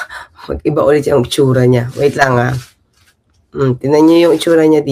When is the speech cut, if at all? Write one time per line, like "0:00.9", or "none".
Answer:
none